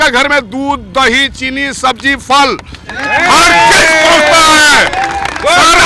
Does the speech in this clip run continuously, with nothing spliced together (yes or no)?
yes